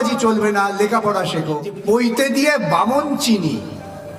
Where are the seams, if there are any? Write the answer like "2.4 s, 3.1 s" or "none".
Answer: 1.8 s